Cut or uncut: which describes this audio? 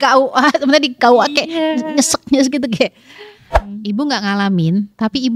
cut